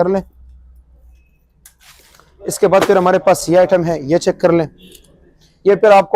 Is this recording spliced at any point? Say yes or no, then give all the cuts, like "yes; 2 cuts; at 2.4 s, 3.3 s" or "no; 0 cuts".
no; 0 cuts